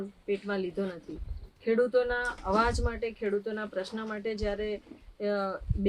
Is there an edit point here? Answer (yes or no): no